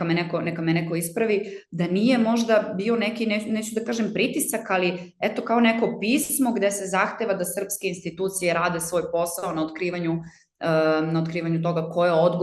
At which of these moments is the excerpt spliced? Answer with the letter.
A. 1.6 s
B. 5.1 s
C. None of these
C